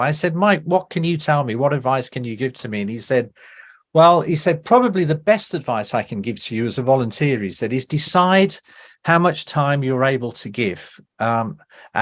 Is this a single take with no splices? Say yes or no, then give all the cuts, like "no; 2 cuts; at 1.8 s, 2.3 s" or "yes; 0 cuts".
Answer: yes; 0 cuts